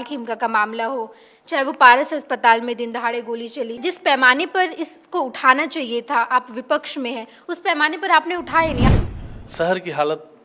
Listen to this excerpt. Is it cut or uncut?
cut